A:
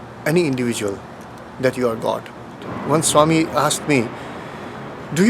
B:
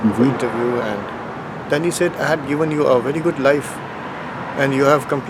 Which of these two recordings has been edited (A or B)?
A